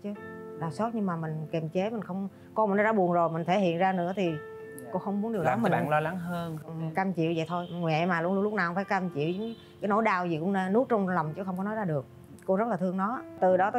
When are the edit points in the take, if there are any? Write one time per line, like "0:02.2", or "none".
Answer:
none